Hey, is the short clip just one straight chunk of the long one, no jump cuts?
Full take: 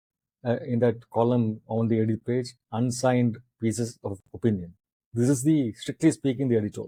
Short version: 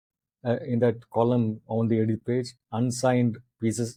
yes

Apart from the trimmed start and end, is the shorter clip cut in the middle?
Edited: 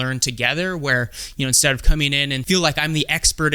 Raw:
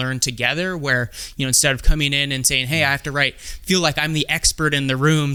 yes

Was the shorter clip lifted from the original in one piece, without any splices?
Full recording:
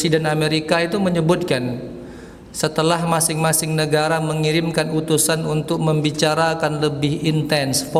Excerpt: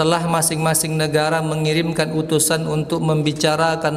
yes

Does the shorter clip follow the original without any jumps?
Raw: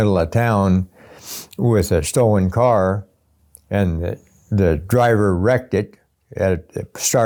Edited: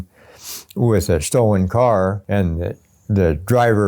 no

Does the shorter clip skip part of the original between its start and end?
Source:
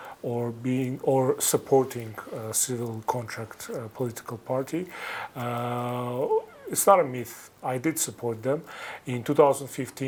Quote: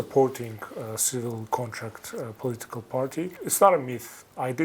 yes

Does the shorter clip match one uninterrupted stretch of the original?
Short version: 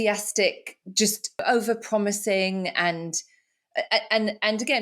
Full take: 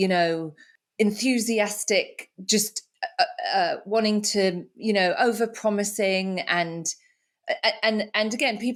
no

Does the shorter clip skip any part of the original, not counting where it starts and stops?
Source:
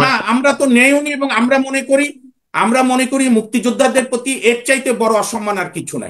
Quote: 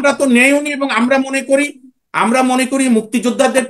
no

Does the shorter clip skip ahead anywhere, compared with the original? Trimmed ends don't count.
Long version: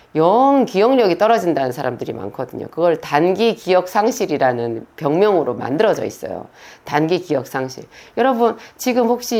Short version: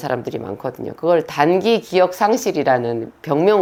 no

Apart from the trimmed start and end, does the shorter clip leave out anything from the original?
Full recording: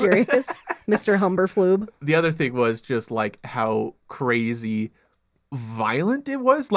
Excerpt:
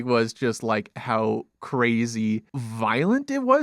yes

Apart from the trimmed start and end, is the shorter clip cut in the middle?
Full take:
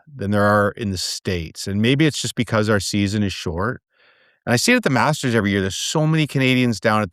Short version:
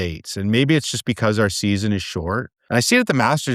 yes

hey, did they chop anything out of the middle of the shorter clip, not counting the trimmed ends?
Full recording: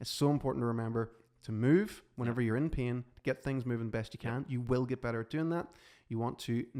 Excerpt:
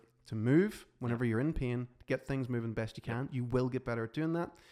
no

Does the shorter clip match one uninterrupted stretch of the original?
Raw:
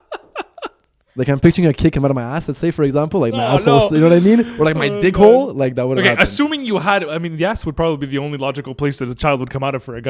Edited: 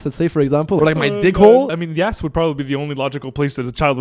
no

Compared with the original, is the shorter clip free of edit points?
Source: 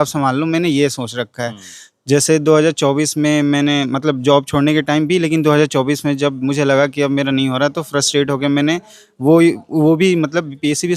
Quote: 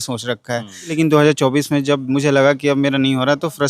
no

